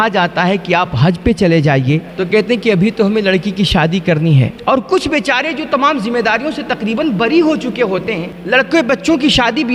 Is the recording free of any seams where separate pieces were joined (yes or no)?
no